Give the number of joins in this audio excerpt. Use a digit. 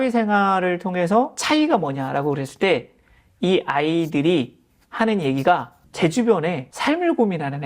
3